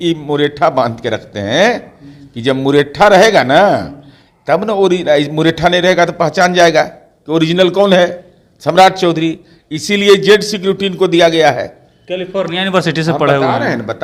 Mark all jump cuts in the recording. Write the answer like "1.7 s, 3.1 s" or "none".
none

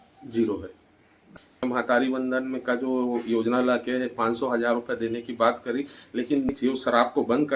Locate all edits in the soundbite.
1.6 s, 6.5 s

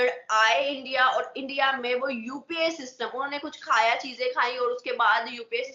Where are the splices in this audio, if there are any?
none

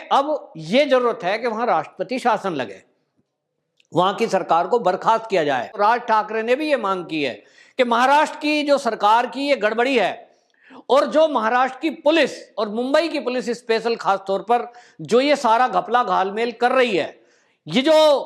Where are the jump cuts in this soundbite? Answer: 5.7 s

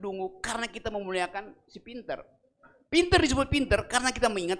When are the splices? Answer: none

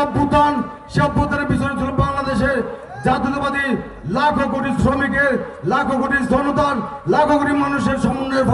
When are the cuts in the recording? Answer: none

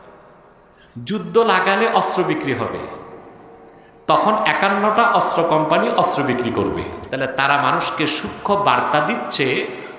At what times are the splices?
7.0 s

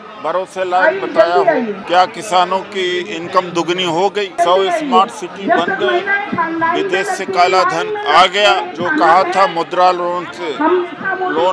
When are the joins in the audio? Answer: 1.8 s, 4.3 s, 8.7 s

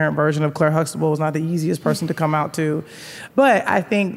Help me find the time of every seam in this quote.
3.1 s

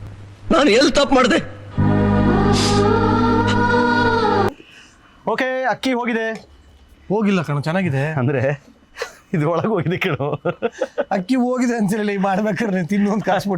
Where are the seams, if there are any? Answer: 4.7 s

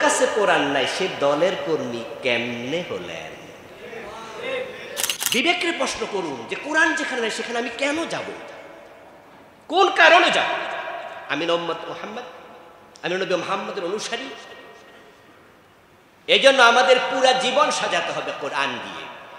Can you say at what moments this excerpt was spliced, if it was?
5.2 s

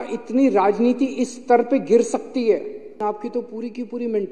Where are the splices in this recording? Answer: 3.0 s

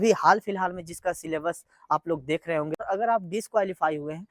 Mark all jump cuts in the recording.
2.8 s

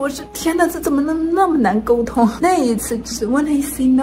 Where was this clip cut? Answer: 2.4 s

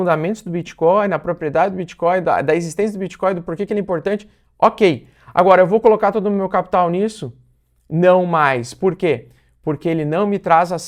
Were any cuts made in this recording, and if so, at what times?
none

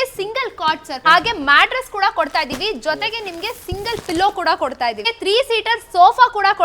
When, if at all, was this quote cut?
0.9 s, 5.1 s

